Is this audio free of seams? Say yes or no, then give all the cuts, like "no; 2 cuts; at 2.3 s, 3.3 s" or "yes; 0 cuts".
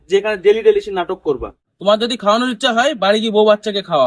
no; 1 cut; at 1.7 s